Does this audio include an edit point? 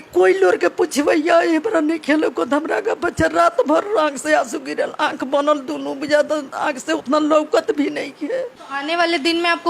yes; 1 cut; at 8.6 s

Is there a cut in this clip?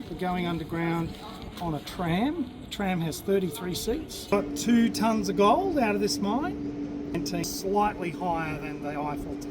yes; 2 cuts; at 4.3 s, 7.4 s

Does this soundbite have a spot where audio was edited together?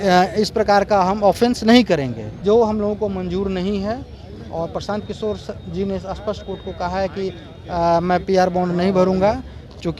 yes; 1 cut; at 2.2 s

